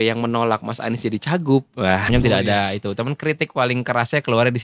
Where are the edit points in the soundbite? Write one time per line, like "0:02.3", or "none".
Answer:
0:02.1